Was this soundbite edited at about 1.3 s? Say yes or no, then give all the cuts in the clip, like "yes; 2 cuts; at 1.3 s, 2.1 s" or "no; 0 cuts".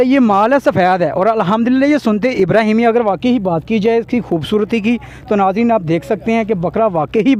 no; 0 cuts